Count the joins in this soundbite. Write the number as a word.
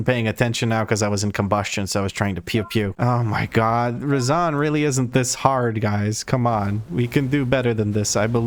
zero